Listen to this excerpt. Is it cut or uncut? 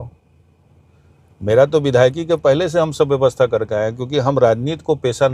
uncut